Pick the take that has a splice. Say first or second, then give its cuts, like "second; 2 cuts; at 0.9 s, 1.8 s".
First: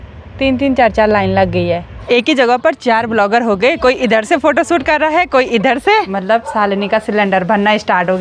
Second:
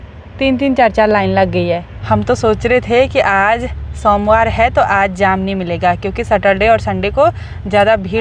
first; 2 cuts; at 1.9 s, 6.1 s